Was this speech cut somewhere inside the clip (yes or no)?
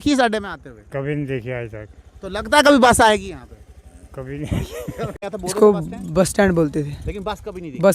yes